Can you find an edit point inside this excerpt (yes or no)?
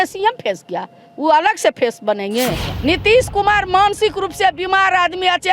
yes